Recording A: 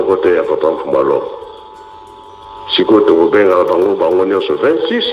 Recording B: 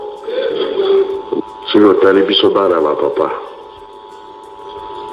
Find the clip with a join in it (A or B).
B